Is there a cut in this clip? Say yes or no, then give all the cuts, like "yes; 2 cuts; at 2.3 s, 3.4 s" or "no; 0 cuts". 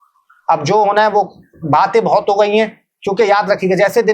no; 0 cuts